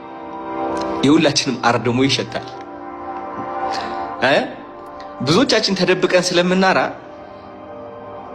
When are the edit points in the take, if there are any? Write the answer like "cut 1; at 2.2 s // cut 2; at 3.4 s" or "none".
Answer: cut 1; at 2.9 s